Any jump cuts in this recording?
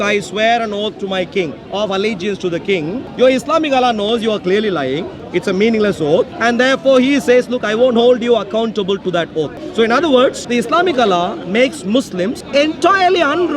yes; 6 cuts; at 3.0 s, 5.2 s, 6.3 s, 9.6 s, 10.4 s, 12.4 s

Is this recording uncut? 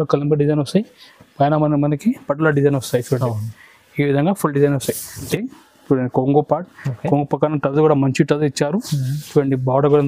no; 1 cut; at 5.3 s

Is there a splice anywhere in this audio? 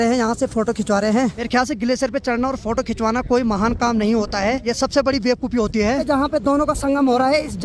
yes; 3 cuts; at 1.5 s, 4.7 s, 6.0 s

